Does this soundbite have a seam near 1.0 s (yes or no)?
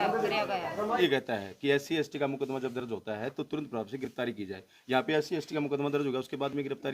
yes